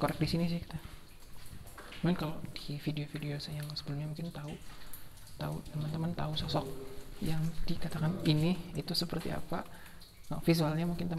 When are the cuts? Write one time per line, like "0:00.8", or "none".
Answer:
none

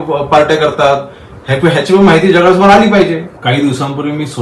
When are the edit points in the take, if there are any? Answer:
0:03.3

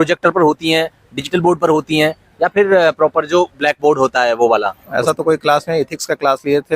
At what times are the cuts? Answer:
0:04.8

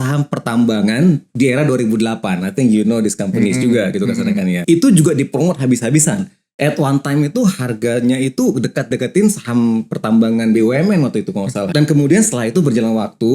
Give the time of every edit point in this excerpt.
0:04.6
0:11.7

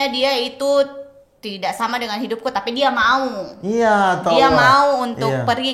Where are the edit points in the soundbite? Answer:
none

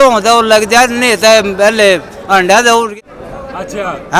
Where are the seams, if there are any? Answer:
0:02.9

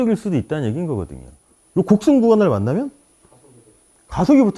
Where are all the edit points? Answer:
0:01.4

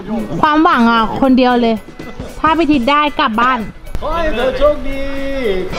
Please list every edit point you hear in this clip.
none

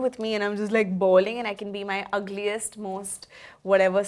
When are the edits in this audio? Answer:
none

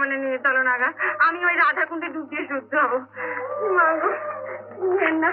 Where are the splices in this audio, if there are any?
none

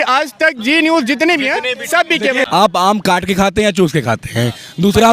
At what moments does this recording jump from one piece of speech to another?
0:02.2

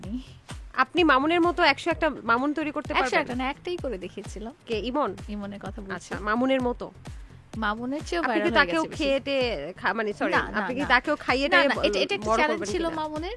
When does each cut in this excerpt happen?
none

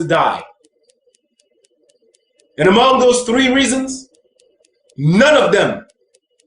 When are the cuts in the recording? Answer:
0:03.3

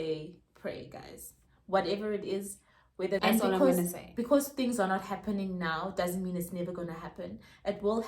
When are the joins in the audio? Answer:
0:03.2

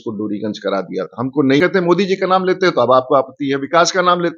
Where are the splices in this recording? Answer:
0:01.6

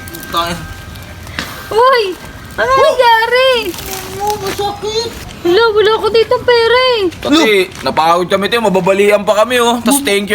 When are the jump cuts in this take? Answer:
0:05.2

